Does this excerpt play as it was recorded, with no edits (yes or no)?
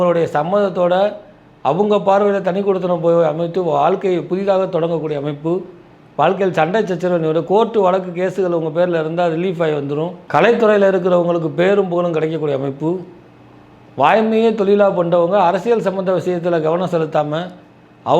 no